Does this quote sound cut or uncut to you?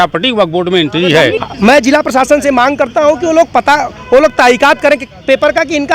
cut